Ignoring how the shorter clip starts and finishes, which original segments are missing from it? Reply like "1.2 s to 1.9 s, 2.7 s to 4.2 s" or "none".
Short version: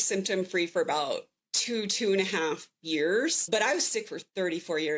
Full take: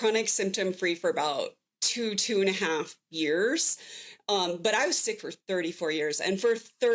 3.7 s to 4.6 s